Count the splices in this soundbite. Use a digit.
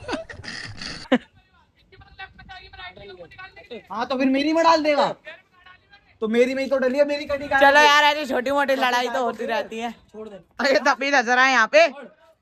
0